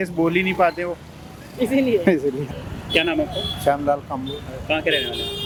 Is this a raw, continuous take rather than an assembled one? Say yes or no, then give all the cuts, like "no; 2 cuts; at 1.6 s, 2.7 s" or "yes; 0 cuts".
yes; 0 cuts